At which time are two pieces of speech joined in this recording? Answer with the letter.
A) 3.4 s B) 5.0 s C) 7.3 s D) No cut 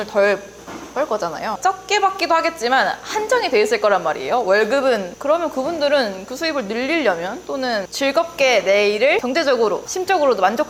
D